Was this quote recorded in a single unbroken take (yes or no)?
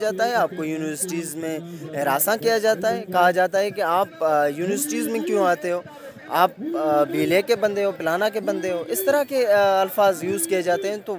yes